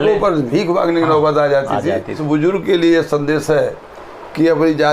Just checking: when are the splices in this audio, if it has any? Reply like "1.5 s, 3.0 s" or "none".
2.2 s